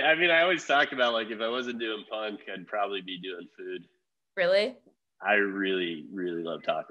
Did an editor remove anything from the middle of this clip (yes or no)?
no